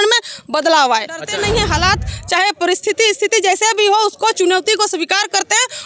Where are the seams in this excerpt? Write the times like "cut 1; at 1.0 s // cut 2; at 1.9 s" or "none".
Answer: cut 1; at 1.3 s

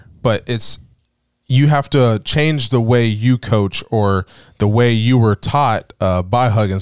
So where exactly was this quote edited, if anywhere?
none

